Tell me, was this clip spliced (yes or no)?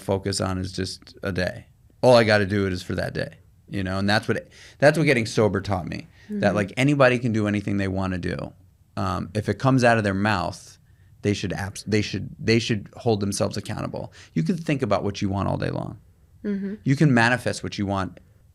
no